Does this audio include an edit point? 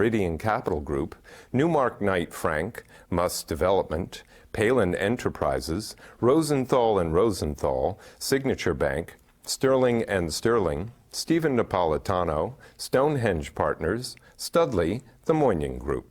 yes; 1 cut; at 15.1 s

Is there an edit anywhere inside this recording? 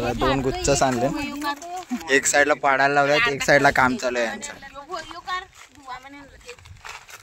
yes; 1 cut; at 2.0 s

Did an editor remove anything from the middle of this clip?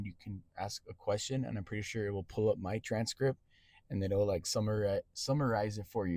no; 0 cuts

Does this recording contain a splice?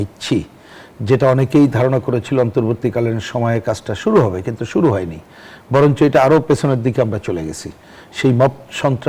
no; 0 cuts

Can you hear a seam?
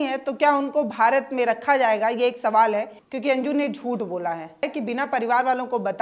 yes; 2 cuts; at 3.0 s, 4.7 s

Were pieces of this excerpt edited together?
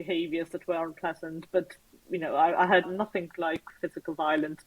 yes; 1 cut; at 2.8 s

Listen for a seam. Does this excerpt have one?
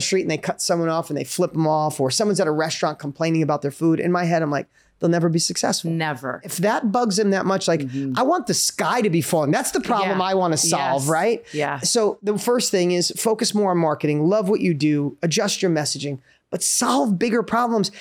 yes; 2 cuts; at 6.4 s, 12.2 s

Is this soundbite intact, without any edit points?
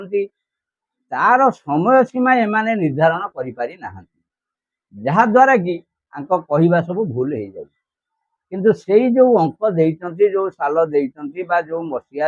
yes; 0 cuts

